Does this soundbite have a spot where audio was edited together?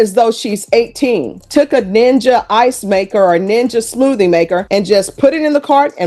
yes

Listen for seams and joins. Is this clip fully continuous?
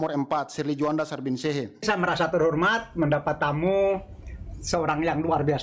no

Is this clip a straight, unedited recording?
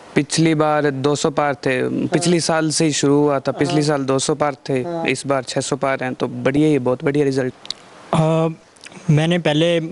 no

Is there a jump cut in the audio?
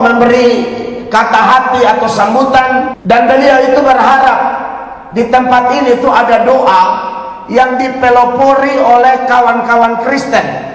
yes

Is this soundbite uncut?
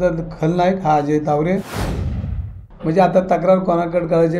no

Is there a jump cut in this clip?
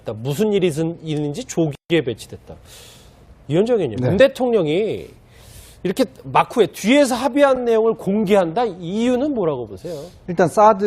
no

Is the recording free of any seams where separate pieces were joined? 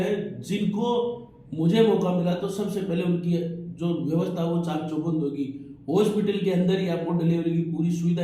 yes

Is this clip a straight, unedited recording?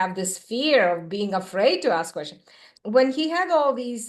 no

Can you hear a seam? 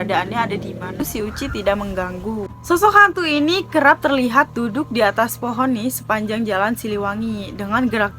yes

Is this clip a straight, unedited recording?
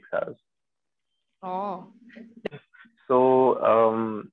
no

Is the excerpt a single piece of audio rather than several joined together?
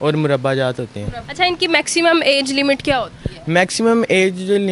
yes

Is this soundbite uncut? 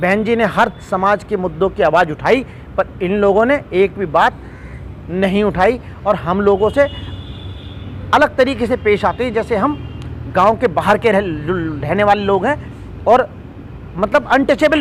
yes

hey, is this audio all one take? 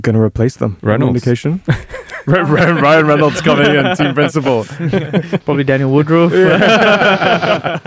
yes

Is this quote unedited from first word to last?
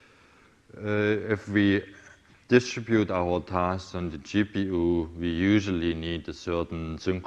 no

